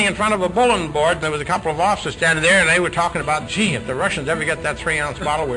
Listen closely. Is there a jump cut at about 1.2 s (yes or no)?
yes